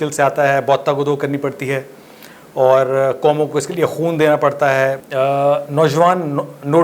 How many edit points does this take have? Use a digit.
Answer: 1